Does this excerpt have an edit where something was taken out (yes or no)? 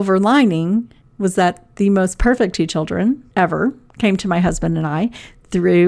yes